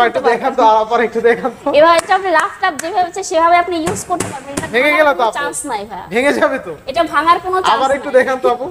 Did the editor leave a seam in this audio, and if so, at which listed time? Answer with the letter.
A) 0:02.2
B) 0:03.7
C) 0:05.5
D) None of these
D